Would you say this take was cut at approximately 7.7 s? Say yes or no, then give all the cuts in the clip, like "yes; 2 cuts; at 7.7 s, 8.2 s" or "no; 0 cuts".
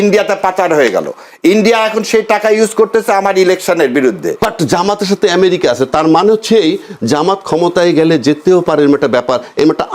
no; 1 cut; at 4.4 s